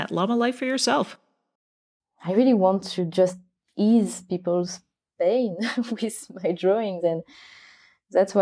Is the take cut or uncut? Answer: cut